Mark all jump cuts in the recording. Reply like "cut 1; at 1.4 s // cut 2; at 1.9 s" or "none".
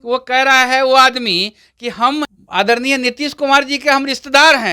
cut 1; at 2.4 s